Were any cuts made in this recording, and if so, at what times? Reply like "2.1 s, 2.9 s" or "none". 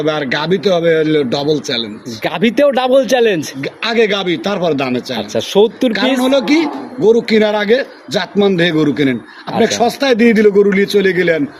none